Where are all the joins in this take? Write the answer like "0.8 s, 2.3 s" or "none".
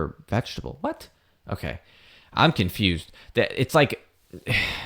none